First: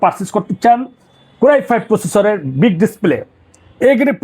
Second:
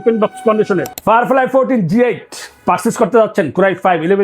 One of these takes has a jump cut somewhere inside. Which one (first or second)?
second